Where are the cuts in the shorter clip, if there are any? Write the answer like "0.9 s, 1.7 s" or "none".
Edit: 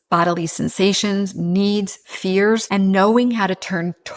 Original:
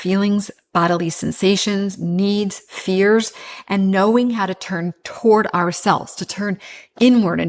2.7 s